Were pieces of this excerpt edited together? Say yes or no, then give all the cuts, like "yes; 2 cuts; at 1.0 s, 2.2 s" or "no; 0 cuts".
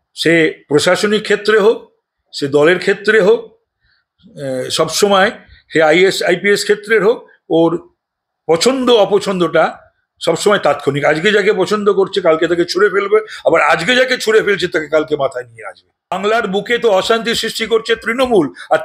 yes; 1 cut; at 16.2 s